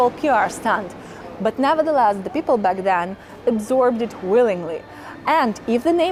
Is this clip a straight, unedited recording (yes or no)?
yes